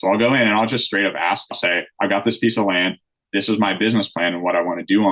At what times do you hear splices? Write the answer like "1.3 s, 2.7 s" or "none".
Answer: 1.6 s